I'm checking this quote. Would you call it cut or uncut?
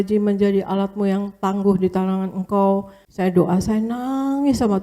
cut